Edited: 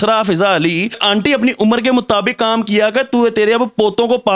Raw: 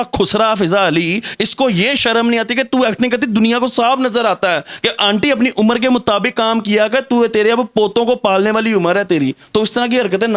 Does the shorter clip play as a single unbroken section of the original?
no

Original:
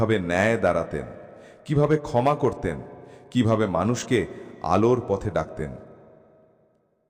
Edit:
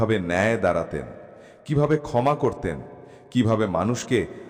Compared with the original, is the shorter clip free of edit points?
yes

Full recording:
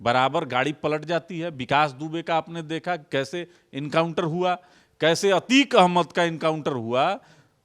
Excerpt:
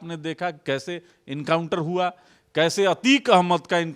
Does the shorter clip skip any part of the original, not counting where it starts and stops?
no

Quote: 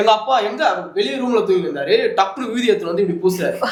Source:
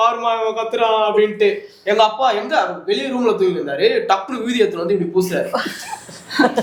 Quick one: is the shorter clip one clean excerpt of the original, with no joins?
yes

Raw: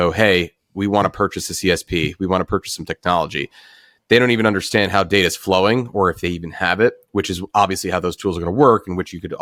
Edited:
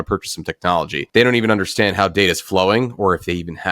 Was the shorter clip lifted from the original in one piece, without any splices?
no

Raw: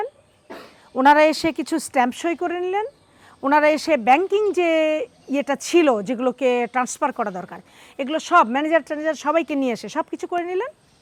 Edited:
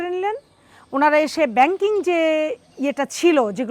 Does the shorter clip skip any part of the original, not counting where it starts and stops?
no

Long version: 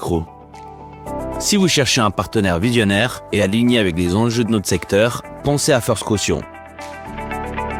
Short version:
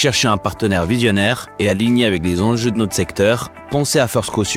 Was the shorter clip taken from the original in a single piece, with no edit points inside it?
yes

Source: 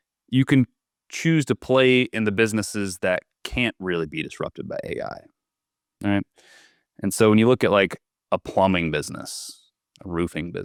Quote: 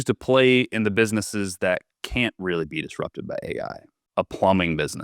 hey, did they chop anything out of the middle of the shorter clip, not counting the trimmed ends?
yes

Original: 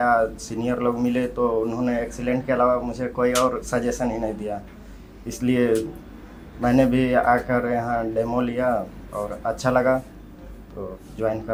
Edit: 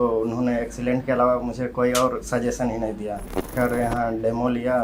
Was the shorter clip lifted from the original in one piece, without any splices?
no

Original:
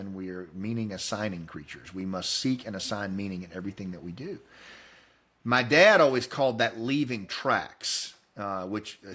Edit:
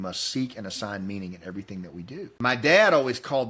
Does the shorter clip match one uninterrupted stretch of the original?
no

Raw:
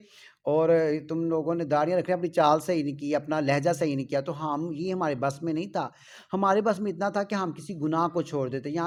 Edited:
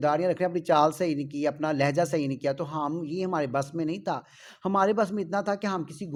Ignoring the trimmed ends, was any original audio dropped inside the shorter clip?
no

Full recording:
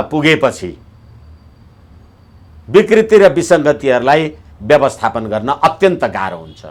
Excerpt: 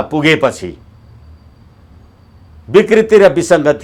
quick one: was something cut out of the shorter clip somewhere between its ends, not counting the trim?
no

